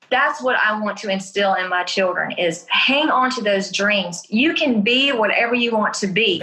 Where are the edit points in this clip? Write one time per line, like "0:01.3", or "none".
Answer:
none